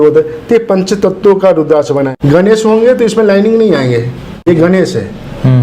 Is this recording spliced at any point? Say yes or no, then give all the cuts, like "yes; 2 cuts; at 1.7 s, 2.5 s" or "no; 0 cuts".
yes; 2 cuts; at 2.1 s, 4.5 s